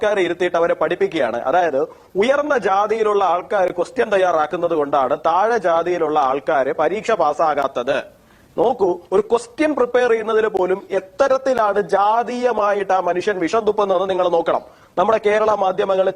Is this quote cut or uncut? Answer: uncut